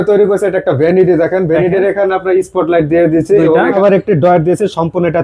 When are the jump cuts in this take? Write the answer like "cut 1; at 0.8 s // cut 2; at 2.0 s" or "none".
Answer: cut 1; at 3.8 s